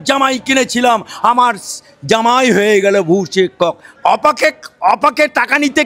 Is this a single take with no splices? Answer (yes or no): no